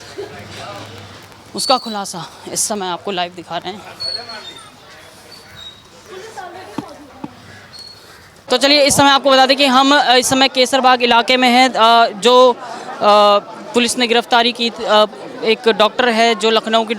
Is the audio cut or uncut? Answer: cut